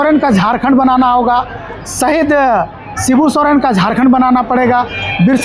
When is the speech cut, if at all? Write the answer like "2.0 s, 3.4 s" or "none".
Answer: none